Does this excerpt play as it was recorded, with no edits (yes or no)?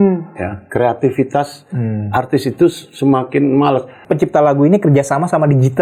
no